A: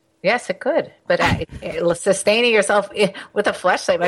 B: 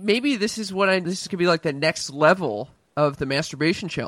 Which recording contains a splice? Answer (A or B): B